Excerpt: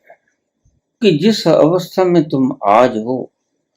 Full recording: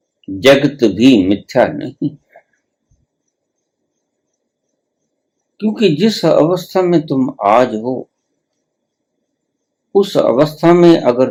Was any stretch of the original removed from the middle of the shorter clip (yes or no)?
yes